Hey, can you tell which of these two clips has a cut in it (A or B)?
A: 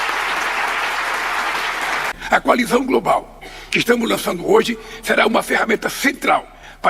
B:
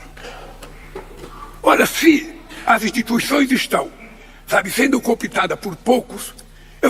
A